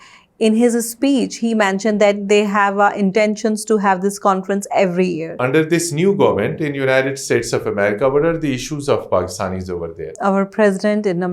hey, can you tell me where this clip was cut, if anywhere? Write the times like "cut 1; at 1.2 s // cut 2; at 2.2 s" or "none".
cut 1; at 5.4 s // cut 2; at 10.1 s